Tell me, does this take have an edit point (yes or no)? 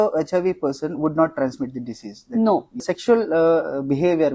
yes